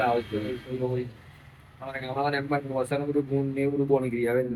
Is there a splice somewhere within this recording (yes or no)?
no